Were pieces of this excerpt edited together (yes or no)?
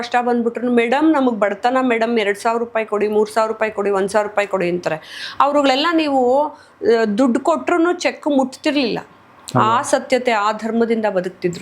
no